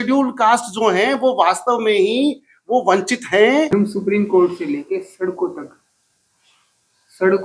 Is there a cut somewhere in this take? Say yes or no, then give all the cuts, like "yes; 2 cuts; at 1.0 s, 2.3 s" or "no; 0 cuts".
yes; 1 cut; at 3.7 s